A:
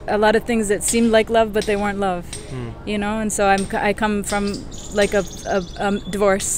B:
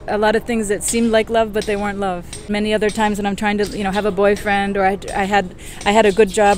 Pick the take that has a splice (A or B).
B